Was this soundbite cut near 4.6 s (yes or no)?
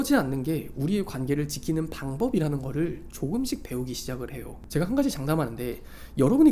yes